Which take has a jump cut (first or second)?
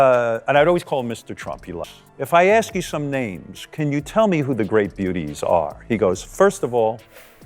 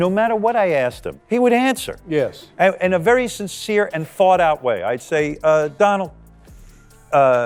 first